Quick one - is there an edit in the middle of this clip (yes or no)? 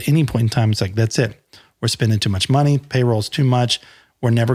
no